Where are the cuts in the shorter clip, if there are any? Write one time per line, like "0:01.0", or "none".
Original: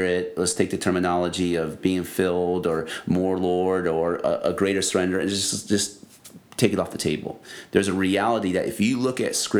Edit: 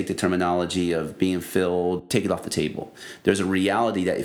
0:02.0